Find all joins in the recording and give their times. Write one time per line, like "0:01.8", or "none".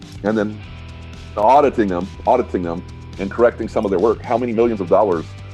none